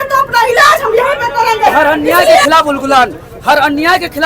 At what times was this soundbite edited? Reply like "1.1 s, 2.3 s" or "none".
2.4 s